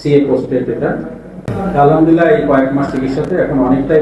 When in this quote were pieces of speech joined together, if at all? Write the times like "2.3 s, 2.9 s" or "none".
1.3 s

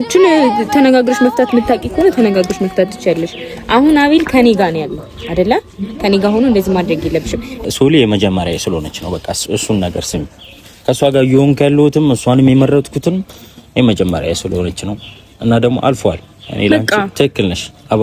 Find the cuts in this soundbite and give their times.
7.6 s

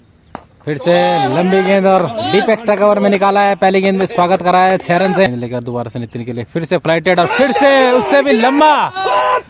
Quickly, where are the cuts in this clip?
5.3 s

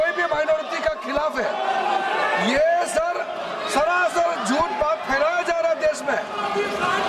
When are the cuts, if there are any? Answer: none

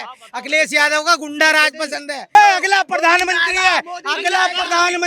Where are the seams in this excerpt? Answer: 2.2 s

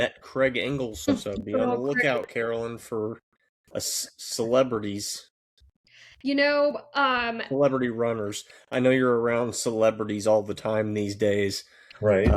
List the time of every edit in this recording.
1.1 s

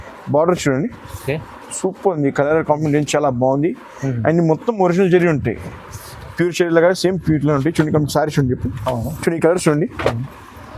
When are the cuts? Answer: 8.8 s

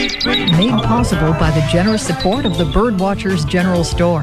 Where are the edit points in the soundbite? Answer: none

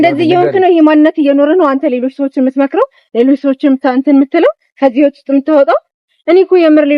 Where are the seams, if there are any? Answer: none

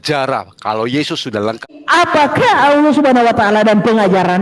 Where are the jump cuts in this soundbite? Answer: 1.6 s

